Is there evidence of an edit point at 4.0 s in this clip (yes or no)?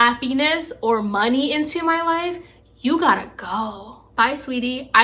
yes